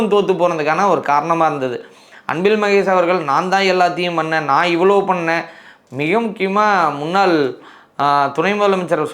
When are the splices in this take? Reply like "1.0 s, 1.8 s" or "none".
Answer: none